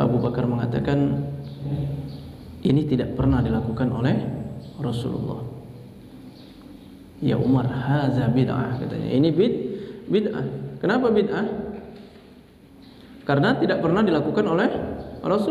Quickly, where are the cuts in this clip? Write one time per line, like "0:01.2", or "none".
0:01.7